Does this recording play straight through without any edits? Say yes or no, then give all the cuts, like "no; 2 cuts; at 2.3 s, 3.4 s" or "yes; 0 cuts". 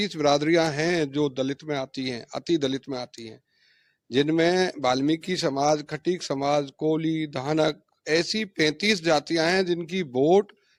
yes; 0 cuts